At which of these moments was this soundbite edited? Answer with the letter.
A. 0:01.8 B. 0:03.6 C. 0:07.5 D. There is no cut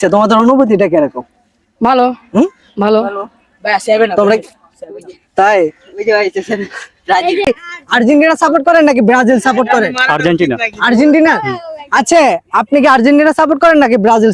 C